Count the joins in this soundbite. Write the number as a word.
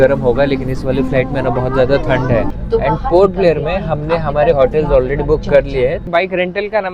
two